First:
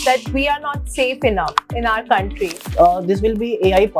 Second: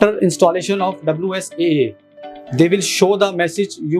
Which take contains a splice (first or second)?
first